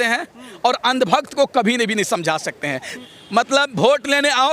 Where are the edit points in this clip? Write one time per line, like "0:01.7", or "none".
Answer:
0:02.9